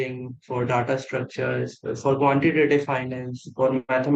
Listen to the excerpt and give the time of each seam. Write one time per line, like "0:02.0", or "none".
none

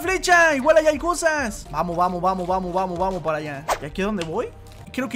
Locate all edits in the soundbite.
none

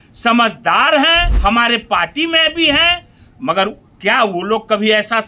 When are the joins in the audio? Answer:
0:01.3

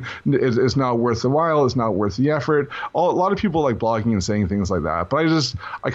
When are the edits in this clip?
none

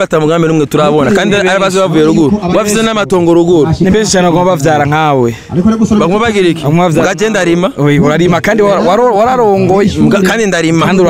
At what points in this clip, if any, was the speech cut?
none

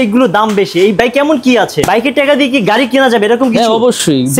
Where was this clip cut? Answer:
0:01.8

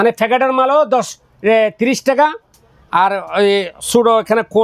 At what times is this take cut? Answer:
none

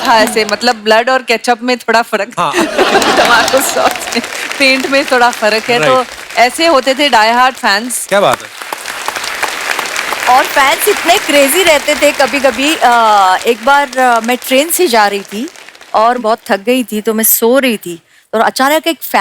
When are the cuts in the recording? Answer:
none

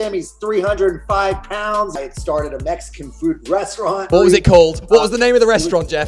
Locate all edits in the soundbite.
0:01.9
0:04.1

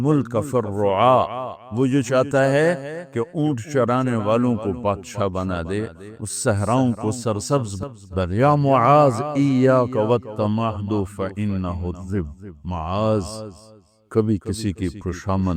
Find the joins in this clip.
0:08.1

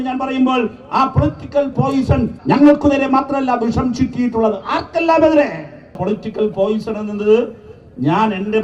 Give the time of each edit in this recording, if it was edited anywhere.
0:02.3
0:06.0

